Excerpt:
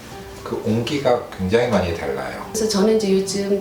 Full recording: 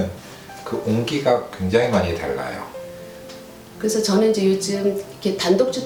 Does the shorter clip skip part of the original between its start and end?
yes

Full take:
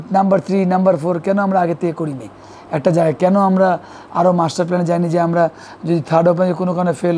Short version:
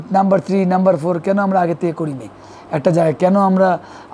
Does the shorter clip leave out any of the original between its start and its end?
no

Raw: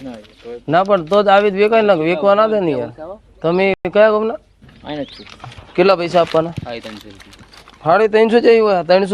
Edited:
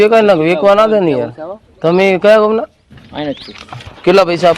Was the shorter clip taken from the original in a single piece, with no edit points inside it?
no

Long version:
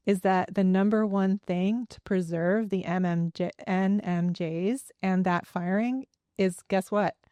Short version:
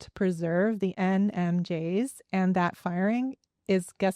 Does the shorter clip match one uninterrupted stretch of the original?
no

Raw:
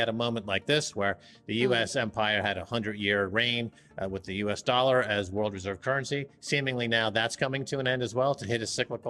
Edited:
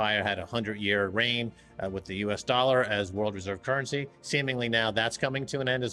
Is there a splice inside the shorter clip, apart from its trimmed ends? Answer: no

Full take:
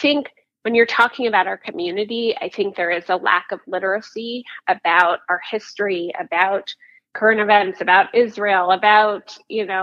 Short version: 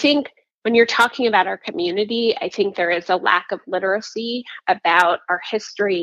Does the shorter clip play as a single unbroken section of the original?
yes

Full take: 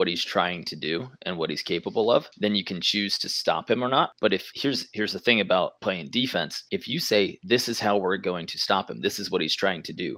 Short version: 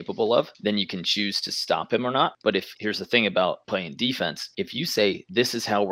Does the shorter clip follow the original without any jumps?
no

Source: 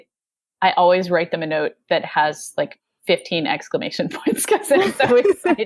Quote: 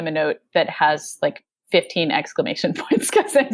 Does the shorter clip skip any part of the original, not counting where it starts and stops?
no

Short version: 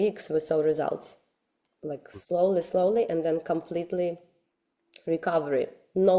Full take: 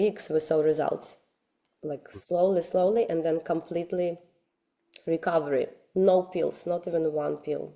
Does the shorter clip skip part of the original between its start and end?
no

